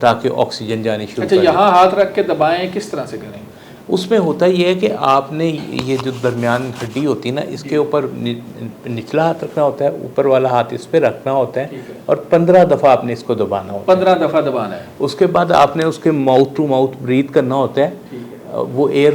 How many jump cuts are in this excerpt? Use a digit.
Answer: 0